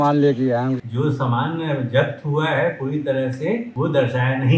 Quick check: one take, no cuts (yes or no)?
no